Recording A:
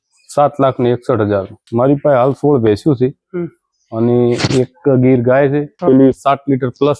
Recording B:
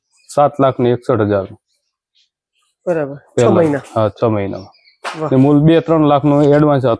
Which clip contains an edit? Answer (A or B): A